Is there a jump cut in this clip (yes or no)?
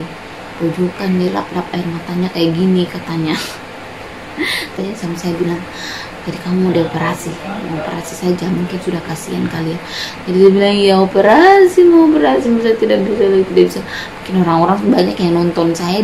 yes